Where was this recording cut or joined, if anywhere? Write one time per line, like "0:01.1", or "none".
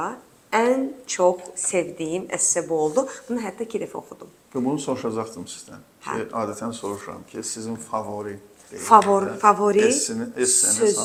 none